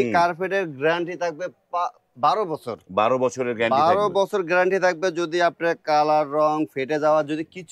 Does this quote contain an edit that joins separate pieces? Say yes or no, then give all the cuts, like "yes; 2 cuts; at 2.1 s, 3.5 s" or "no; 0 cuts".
no; 0 cuts